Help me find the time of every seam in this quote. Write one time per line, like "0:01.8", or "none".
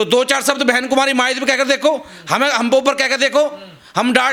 none